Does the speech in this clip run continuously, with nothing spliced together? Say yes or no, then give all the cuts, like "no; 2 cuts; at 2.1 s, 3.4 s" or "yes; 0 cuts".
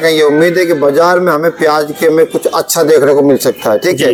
yes; 0 cuts